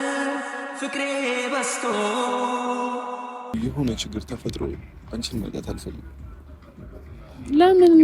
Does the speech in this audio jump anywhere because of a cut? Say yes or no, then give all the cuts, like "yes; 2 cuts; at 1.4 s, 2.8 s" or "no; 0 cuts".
yes; 1 cut; at 3.6 s